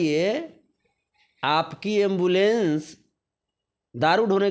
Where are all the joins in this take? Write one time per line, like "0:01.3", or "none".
none